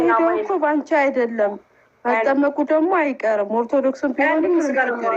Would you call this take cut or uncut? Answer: uncut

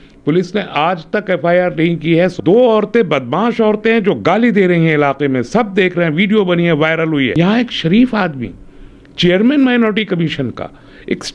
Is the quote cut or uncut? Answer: cut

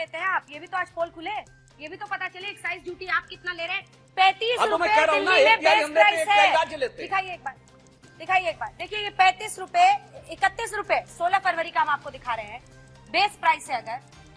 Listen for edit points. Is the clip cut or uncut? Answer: uncut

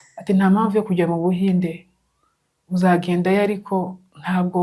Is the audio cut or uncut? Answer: uncut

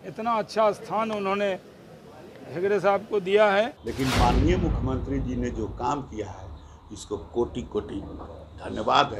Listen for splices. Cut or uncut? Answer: cut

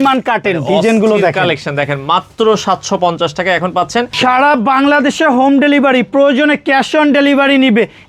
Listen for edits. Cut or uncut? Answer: cut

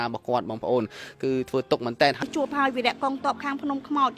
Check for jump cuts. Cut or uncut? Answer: cut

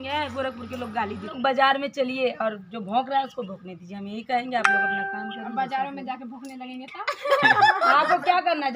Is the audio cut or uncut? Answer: cut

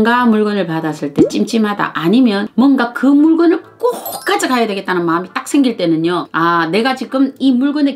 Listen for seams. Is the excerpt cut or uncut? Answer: cut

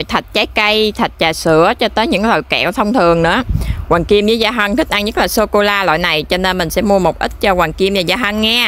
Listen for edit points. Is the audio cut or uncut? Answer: uncut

